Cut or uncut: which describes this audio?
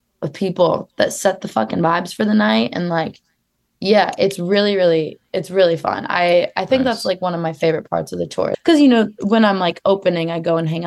cut